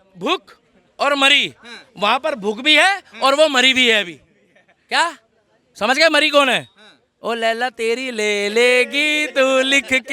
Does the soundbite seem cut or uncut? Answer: uncut